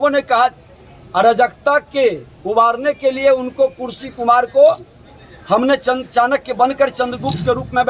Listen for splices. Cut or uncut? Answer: uncut